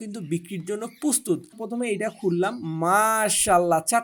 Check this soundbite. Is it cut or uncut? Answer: cut